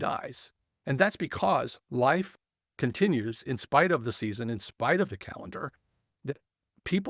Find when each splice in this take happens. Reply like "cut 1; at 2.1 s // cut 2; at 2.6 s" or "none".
none